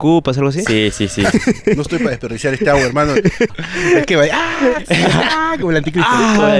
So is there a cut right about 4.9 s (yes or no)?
no